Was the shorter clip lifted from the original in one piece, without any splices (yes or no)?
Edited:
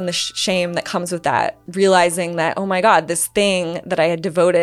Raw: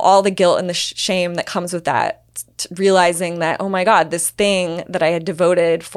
no